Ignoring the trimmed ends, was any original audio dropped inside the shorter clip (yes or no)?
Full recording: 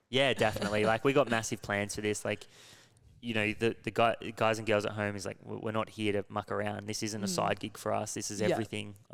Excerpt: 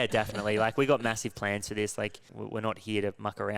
yes